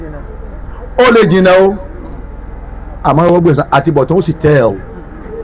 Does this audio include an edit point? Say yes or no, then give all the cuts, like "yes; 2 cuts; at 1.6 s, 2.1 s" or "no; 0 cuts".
no; 0 cuts